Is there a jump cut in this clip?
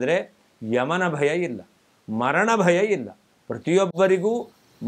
no; 0 cuts

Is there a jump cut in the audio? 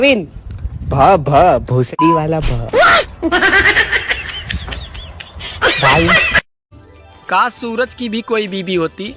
yes; 1 cut; at 6.7 s

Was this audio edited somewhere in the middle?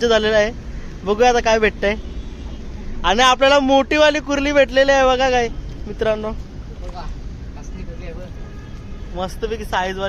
no; 0 cuts

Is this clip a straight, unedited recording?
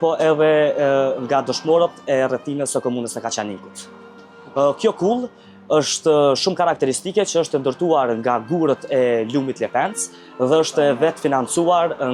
yes; 0 cuts

